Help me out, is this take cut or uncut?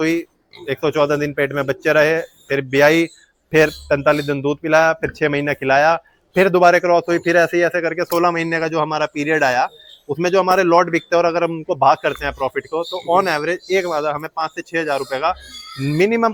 uncut